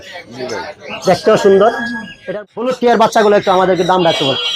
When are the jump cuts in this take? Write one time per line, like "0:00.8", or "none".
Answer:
0:02.3